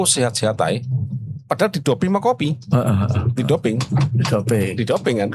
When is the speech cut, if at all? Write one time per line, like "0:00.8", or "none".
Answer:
none